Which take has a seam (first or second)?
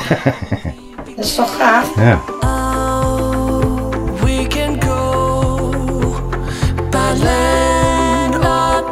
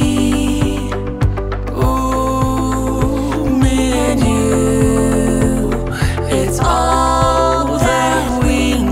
first